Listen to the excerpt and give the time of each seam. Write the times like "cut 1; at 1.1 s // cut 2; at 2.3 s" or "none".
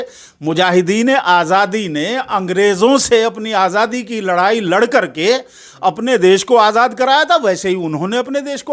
none